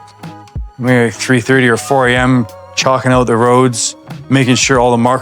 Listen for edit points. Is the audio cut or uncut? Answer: uncut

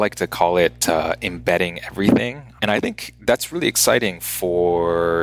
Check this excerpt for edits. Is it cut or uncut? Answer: cut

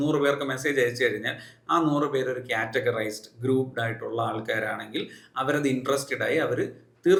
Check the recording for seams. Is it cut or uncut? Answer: uncut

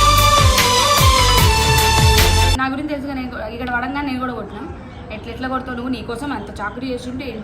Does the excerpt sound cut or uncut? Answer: cut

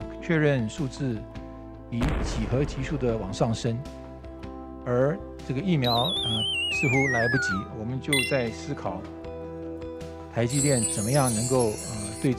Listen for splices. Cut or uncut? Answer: uncut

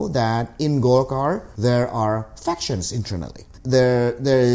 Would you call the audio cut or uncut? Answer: cut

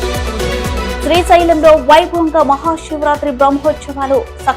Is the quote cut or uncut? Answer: cut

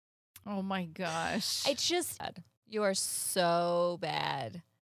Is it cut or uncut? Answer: cut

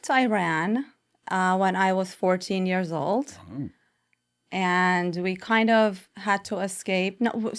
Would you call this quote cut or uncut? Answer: uncut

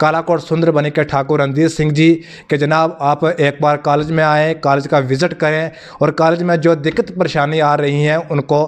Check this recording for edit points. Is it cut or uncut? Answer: uncut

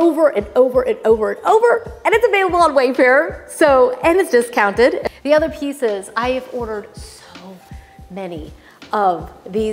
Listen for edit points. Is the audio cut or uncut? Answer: cut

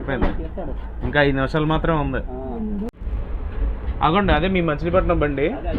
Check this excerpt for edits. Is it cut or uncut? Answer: cut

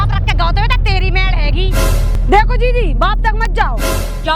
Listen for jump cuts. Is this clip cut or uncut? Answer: cut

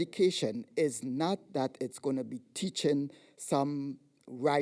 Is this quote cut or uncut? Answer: uncut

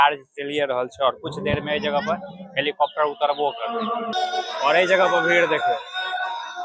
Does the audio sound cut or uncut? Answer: uncut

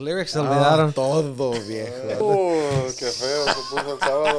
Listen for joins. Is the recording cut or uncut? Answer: cut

